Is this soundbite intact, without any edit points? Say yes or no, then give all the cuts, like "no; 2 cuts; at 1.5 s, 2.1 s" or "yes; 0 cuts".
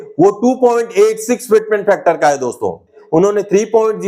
no; 1 cut; at 3.0 s